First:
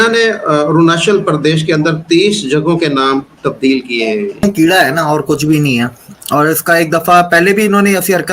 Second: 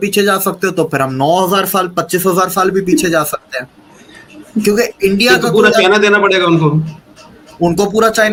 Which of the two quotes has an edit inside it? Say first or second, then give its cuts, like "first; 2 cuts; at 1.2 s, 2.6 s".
first; 1 cut; at 4.4 s